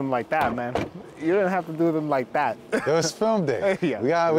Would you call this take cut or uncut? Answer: uncut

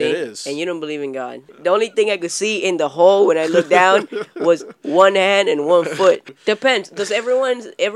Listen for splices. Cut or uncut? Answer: cut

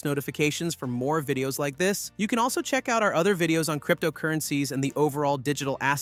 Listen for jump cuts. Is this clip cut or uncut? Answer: uncut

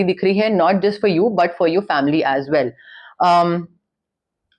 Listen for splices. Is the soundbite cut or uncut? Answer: uncut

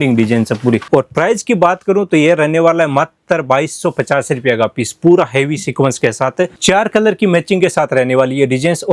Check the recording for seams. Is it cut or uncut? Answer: cut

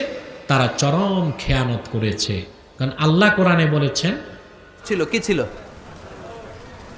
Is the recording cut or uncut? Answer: cut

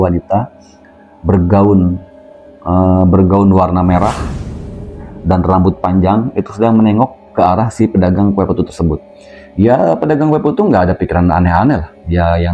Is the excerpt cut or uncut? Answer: uncut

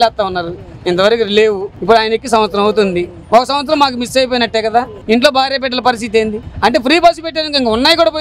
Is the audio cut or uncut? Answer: cut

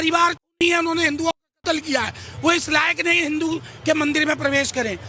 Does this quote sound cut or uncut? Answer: uncut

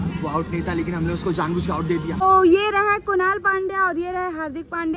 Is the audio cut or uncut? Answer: cut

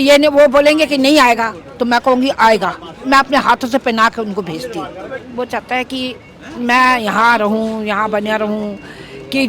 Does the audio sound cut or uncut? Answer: cut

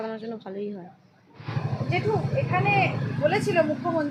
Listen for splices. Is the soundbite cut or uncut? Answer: uncut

